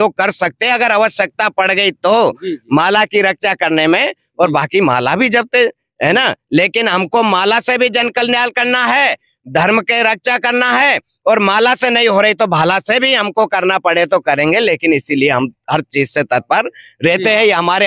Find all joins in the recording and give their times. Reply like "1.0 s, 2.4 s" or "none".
none